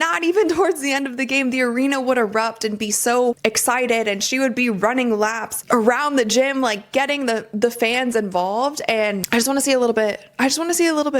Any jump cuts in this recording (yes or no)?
yes